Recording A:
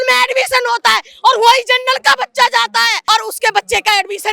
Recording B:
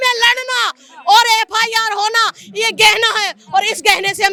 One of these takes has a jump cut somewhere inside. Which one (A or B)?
A